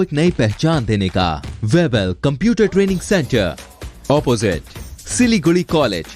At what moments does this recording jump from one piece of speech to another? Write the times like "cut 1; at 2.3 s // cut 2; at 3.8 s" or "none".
cut 1; at 1.5 s